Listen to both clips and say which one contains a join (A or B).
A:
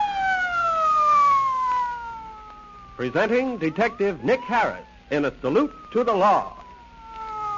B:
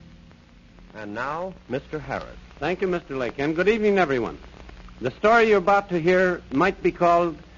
B